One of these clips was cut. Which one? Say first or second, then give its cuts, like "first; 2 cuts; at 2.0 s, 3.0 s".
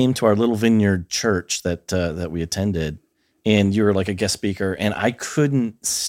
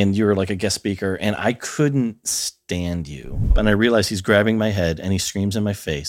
second; 1 cut; at 3.6 s